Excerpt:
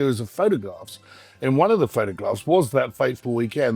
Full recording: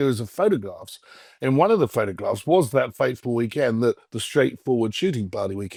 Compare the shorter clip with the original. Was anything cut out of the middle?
no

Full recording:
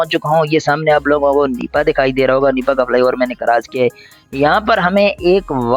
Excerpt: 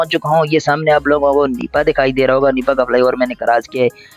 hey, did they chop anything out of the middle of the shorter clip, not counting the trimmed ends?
no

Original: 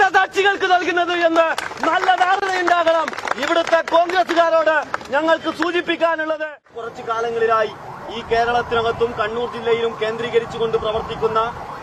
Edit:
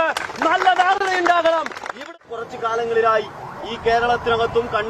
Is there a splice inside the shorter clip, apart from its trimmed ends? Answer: yes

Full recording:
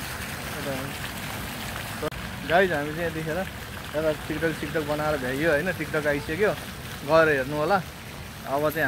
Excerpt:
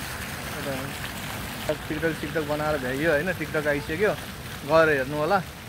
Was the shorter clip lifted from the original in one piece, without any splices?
no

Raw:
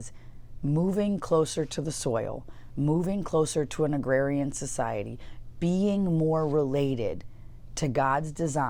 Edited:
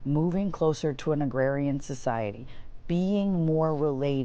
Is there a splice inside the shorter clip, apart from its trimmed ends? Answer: no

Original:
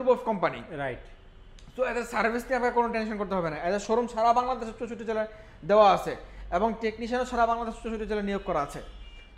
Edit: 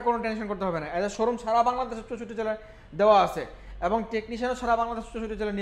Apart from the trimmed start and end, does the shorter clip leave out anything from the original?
no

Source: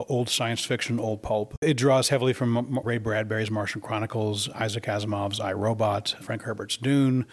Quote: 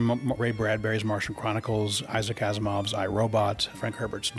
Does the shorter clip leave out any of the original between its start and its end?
no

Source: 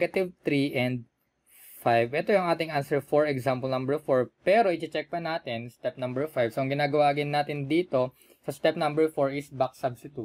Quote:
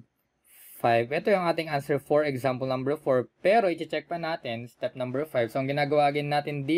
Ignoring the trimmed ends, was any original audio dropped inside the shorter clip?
no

